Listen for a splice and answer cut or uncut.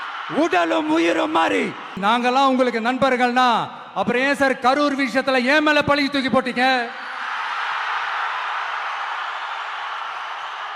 cut